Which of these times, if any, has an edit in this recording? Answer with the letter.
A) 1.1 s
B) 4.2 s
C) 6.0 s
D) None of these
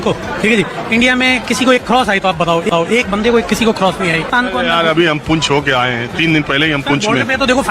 B